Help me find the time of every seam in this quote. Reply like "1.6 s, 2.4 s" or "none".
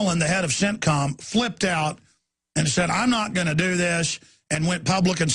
3.2 s